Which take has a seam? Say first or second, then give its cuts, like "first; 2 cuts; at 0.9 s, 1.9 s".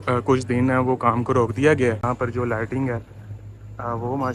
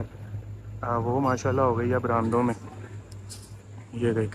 first; 1 cut; at 2.0 s